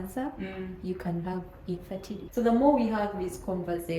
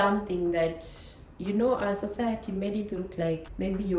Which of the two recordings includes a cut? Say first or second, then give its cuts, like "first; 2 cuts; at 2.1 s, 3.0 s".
first; 1 cut; at 2.2 s